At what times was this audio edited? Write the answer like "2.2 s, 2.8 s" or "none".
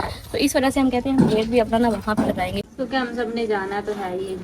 2.7 s